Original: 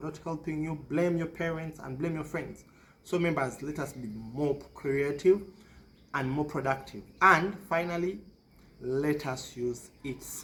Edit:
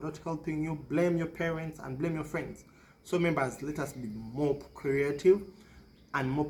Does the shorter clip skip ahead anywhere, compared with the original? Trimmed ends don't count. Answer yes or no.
no